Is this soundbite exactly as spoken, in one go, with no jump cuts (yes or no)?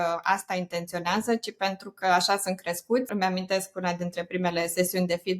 no